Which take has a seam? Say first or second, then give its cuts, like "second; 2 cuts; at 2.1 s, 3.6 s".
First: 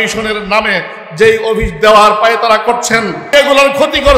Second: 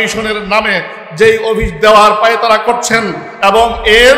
first; 1 cut; at 3.3 s